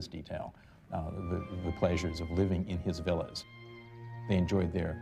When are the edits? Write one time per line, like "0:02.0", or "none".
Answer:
0:03.8